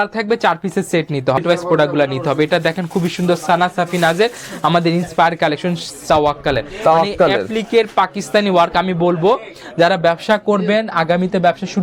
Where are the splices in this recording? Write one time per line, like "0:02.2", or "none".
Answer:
0:01.4
0:06.0